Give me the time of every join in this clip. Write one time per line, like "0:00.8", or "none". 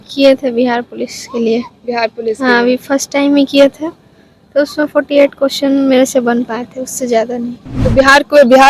none